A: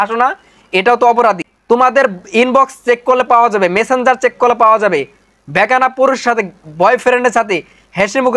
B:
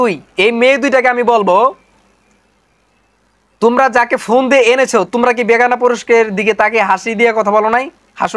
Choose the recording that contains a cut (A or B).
A